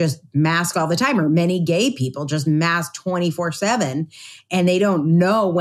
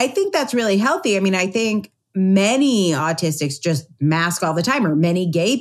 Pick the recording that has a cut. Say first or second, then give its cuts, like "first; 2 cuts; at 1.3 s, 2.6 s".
second; 1 cut; at 2.0 s